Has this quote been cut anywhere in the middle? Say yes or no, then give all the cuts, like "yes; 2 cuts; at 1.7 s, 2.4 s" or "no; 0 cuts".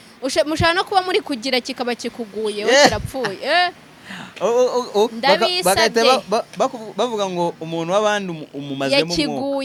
no; 0 cuts